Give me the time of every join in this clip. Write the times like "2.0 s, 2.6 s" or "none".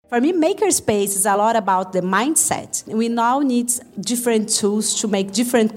1.4 s, 2.8 s